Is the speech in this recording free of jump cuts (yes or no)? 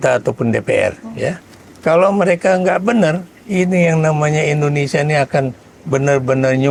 yes